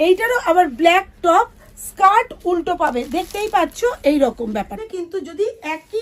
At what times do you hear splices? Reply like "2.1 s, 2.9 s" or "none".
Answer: 4.9 s